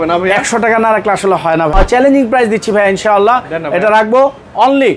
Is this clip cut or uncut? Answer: cut